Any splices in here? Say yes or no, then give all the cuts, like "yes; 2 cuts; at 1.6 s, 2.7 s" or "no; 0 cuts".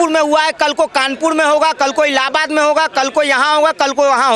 no; 0 cuts